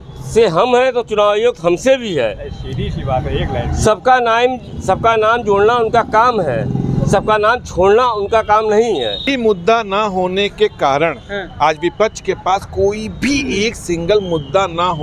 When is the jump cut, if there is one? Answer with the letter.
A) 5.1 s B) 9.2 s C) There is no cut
B